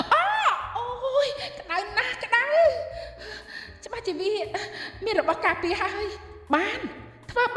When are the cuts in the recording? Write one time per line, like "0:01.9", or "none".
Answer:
none